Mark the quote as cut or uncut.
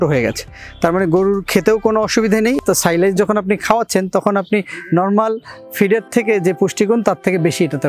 cut